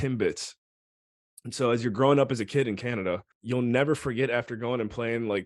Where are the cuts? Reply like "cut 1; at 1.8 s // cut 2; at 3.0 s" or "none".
cut 1; at 3.3 s